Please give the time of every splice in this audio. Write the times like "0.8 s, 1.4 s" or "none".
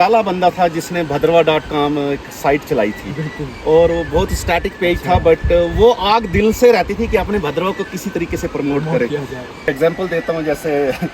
9.6 s